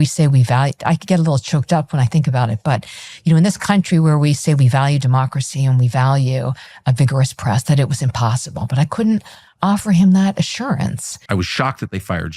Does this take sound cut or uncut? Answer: cut